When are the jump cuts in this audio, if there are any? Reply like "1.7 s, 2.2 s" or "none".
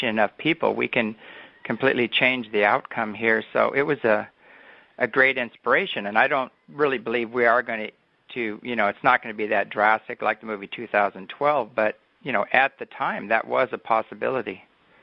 5.4 s